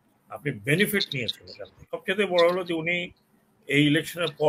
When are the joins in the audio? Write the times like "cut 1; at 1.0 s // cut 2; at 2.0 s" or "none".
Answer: cut 1; at 1.9 s